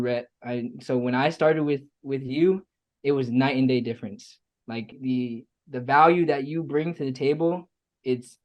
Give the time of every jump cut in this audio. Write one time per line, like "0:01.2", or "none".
0:05.0